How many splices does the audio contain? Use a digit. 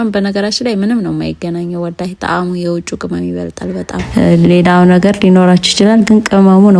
1